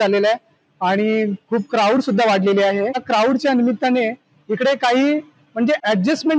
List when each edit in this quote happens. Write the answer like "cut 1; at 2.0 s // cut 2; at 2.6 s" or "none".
none